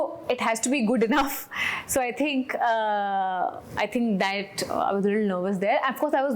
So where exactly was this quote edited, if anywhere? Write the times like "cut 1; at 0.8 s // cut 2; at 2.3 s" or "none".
none